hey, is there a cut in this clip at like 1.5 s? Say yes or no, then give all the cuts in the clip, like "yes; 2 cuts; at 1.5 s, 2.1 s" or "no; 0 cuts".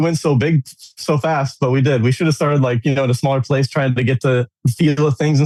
no; 0 cuts